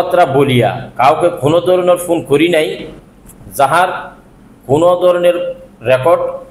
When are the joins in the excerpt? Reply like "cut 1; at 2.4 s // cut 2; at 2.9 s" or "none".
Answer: none